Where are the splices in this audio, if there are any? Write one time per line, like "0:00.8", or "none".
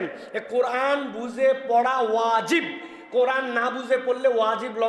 none